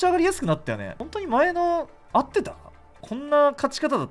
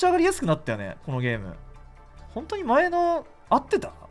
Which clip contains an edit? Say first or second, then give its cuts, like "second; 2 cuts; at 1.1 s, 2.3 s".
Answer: first; 2 cuts; at 0.9 s, 2.9 s